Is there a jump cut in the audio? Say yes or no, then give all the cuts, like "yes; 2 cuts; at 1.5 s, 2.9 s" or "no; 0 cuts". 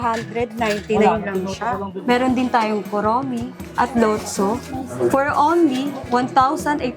yes; 4 cuts; at 1.9 s, 3.6 s, 4.9 s, 6.0 s